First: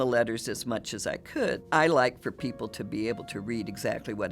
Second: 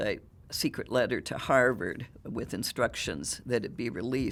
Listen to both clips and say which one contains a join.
first; 1 cut; at 1.6 s

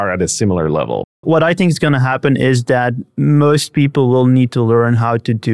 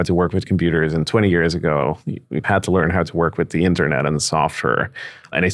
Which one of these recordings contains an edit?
first; 1 cut; at 1.2 s

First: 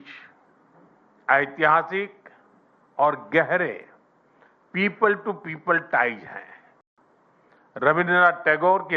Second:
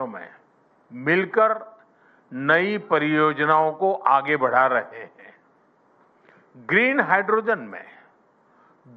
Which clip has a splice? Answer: second; 1 cut; at 3.4 s

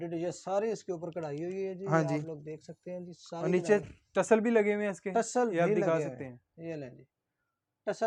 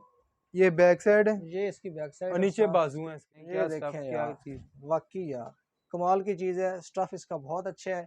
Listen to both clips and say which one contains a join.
second; 1 cut; at 3.4 s

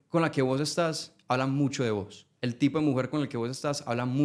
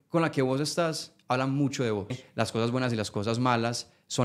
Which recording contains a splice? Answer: second; 1 cut; at 2.2 s

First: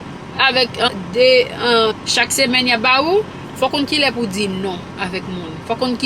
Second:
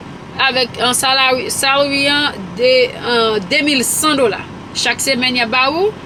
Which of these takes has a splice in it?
first; 3 cuts; at 0.9 s, 2.0 s, 3.4 s

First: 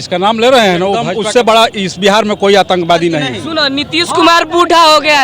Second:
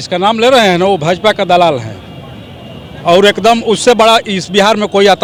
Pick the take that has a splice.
first; 2 cuts; at 1.3 s, 3.4 s

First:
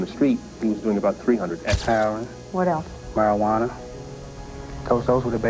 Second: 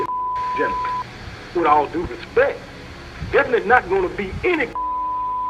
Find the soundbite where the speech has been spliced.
first; 1 cut; at 1.8 s

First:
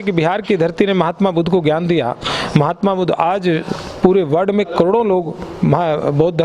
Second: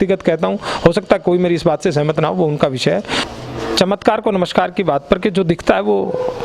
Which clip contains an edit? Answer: second; 1 cut; at 3.2 s

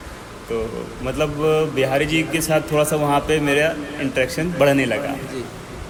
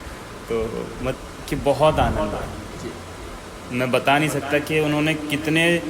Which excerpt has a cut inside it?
second; 1 cut; at 1.1 s

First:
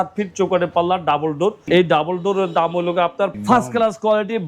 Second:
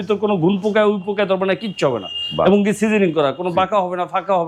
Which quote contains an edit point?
first; 2 cuts; at 1.6 s, 3.3 s

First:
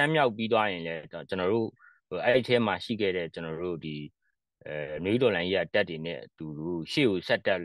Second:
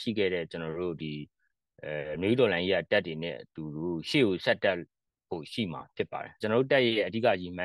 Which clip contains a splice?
second; 1 cut; at 6.3 s

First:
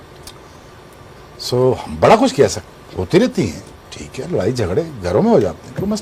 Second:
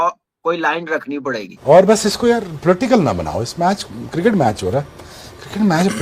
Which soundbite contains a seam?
second; 1 cut; at 1.6 s

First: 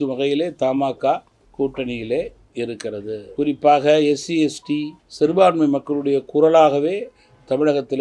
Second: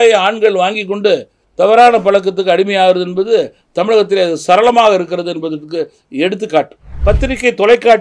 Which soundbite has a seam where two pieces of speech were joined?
second; 1 cut; at 6.8 s

